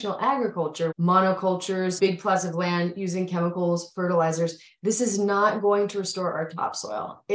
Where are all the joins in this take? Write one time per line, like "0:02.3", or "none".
0:00.9
0:02.0